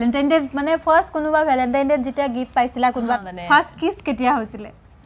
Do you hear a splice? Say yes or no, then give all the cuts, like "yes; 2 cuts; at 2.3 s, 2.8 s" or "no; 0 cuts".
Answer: yes; 1 cut; at 3.3 s